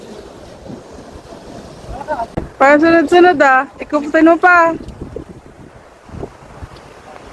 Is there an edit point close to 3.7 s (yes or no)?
no